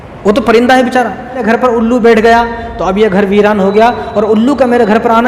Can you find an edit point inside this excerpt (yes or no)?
yes